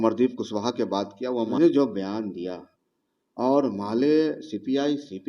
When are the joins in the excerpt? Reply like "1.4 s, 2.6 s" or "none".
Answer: 1.5 s